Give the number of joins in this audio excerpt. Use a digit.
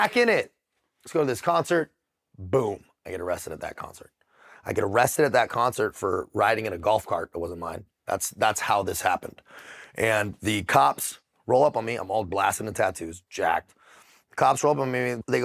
0